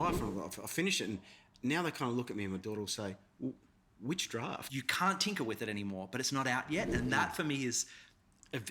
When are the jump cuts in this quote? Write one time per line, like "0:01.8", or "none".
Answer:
0:04.6